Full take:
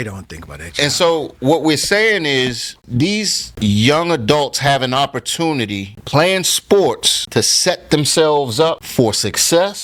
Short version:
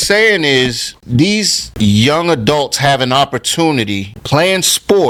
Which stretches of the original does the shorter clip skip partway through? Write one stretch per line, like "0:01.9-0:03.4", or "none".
none